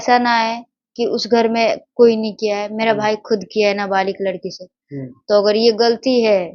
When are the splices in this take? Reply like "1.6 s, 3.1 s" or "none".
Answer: none

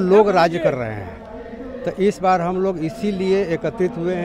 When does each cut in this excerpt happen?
none

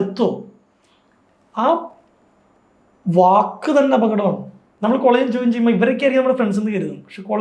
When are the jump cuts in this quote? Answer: 4.7 s

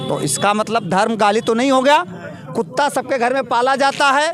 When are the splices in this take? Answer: none

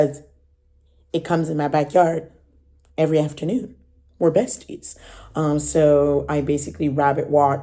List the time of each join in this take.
none

